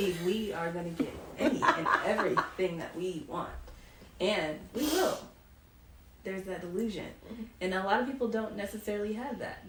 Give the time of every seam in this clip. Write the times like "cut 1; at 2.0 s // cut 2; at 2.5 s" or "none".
none